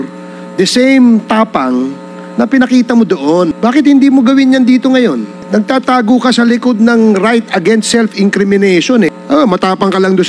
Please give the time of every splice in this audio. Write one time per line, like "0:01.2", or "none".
0:03.5
0:05.4
0:09.1